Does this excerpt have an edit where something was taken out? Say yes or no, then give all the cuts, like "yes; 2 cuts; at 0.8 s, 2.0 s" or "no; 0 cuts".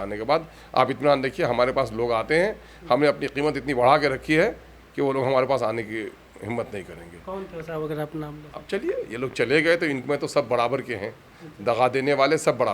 no; 0 cuts